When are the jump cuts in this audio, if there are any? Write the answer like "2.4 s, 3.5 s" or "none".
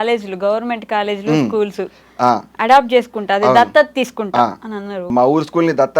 5.1 s